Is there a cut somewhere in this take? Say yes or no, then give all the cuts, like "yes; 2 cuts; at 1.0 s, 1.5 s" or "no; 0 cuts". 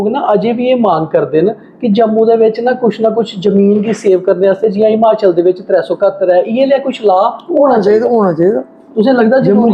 no; 0 cuts